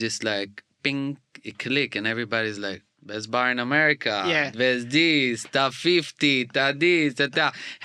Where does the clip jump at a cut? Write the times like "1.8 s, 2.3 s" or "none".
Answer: 2.9 s